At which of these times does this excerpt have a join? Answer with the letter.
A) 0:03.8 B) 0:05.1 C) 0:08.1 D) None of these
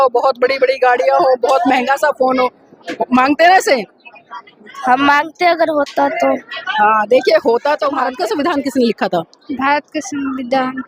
C